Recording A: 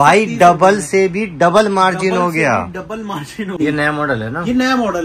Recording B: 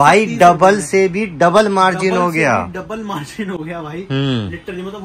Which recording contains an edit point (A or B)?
A